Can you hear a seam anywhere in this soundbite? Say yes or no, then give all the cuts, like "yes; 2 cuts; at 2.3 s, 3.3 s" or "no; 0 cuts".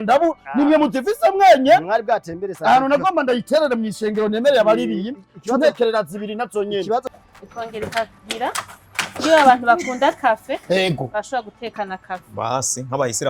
yes; 1 cut; at 7.0 s